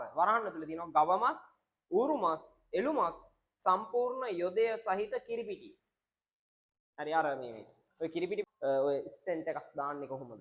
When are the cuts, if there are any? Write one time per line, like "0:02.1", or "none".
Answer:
0:08.5

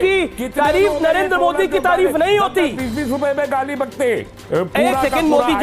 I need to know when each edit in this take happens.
0:04.4

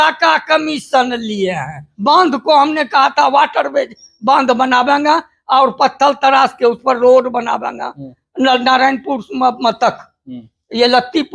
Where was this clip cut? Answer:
0:01.8

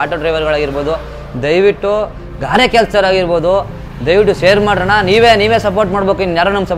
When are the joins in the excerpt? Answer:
none

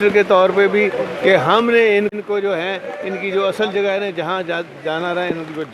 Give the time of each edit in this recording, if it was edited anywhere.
0:02.1

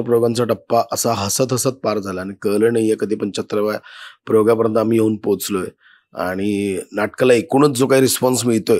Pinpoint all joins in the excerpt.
none

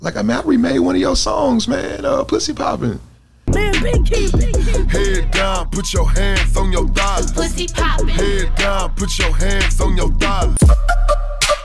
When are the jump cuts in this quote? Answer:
0:10.4

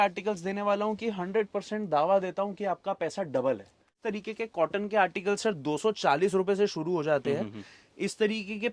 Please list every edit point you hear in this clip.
0:03.8

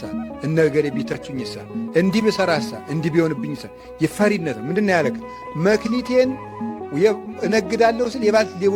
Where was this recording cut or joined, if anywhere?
none

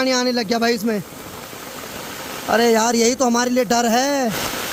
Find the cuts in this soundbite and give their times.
none

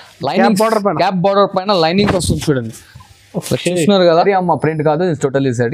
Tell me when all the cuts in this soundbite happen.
0:04.2

